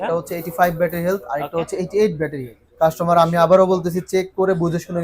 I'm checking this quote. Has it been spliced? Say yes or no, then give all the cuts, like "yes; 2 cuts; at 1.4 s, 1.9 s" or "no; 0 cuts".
yes; 1 cut; at 2.6 s